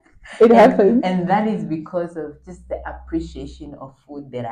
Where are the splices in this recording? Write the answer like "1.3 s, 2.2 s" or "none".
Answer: none